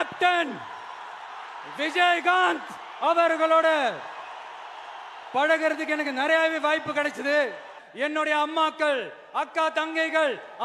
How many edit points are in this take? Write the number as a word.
one